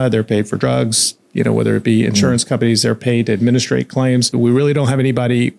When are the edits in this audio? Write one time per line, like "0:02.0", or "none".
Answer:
0:04.3